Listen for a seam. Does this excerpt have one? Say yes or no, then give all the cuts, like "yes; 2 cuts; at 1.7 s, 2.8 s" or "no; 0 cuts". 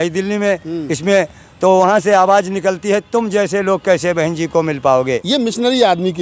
yes; 1 cut; at 5.2 s